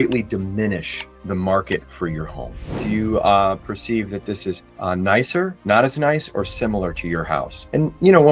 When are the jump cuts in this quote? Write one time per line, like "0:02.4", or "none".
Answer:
0:02.7